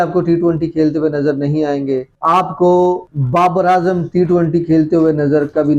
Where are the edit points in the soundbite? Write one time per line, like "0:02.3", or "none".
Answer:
none